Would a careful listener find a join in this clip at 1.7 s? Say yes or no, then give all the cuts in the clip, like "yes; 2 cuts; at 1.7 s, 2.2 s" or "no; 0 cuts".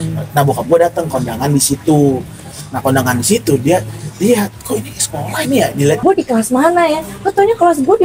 no; 1 cut; at 6.0 s